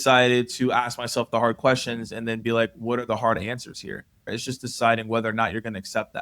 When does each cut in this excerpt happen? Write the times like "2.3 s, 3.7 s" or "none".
4.4 s